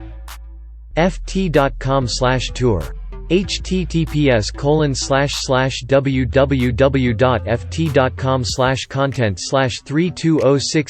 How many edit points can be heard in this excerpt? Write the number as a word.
one